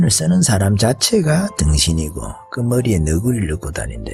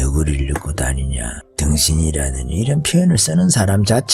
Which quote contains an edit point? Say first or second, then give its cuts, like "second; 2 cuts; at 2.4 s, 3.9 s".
second; 1 cut; at 1.4 s